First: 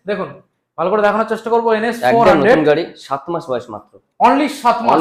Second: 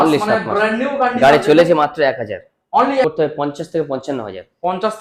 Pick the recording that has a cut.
second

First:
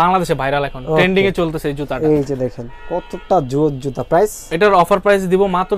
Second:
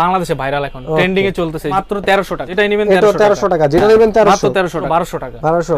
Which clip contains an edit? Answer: second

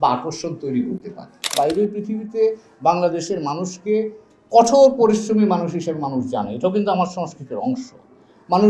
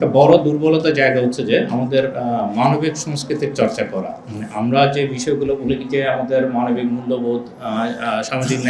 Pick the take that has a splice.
first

